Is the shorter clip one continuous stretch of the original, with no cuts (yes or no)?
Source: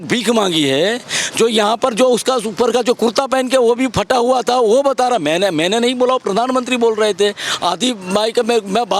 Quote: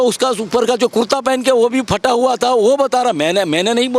yes